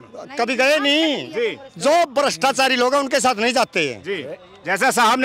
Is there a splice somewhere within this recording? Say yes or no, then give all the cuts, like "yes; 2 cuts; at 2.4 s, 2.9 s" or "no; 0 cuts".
no; 0 cuts